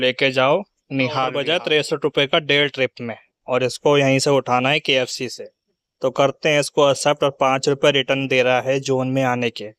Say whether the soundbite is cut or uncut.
cut